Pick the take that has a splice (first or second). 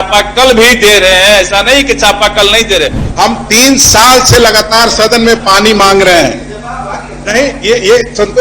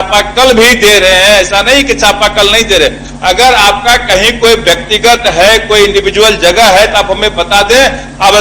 first